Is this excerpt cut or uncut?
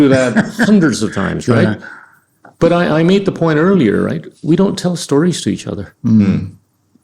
uncut